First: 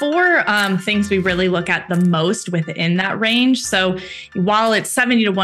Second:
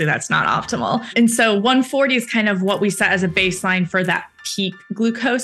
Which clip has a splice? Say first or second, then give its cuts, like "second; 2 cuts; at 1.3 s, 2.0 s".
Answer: second; 1 cut; at 1.1 s